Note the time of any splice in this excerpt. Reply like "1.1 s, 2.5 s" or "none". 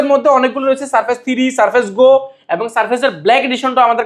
none